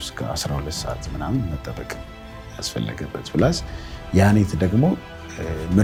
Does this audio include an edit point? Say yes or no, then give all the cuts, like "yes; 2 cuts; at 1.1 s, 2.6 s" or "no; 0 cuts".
no; 0 cuts